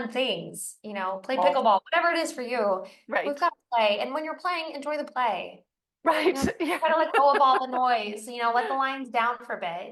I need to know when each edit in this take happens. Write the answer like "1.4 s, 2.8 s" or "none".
none